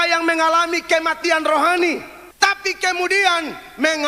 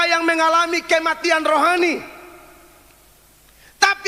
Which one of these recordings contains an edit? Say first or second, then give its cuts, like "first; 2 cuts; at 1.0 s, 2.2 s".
first; 1 cut; at 2.2 s